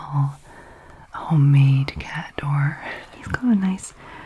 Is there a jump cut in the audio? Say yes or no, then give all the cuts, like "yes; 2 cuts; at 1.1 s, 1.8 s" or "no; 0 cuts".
yes; 1 cut; at 3.1 s